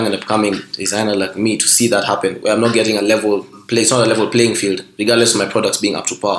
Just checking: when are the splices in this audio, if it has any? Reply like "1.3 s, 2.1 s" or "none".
3.6 s